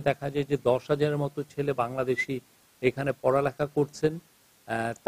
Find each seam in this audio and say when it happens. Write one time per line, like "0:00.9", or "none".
none